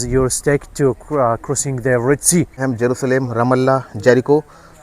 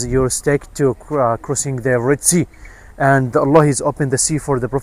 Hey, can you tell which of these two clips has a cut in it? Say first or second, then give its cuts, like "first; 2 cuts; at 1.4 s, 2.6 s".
first; 1 cut; at 2.6 s